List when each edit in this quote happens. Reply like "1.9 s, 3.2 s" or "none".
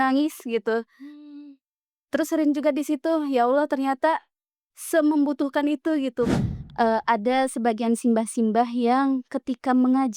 6.3 s